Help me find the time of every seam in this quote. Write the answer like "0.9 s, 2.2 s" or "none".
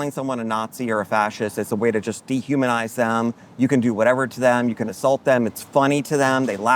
none